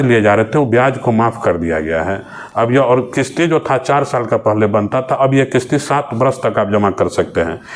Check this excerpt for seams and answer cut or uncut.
uncut